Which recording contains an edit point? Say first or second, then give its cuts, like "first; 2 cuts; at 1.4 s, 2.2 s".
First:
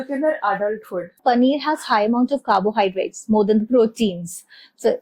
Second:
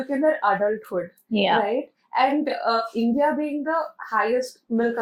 first; 1 cut; at 1.2 s